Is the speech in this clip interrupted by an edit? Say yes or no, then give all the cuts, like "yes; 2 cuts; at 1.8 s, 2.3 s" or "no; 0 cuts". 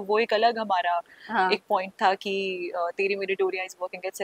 no; 0 cuts